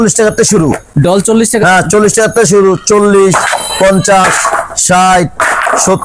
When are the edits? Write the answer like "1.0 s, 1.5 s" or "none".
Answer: none